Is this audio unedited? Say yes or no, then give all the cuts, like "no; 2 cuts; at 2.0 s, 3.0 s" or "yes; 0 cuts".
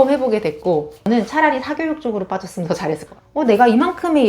no; 2 cuts; at 0.9 s, 3.0 s